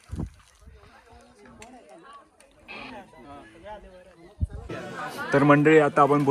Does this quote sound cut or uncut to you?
cut